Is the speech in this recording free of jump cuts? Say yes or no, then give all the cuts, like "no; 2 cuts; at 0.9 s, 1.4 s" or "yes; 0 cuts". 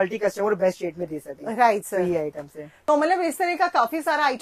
yes; 0 cuts